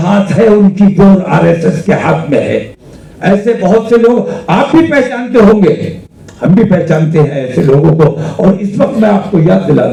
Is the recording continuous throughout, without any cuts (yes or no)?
yes